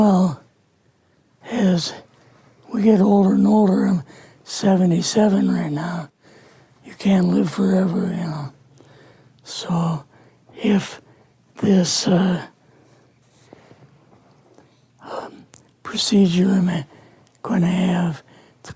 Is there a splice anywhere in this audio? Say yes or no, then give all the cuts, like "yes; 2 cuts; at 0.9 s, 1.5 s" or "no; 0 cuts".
no; 0 cuts